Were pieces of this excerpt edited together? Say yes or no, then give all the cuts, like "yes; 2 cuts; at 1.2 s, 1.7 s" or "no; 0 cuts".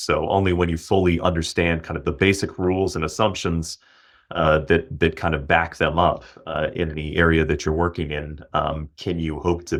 no; 0 cuts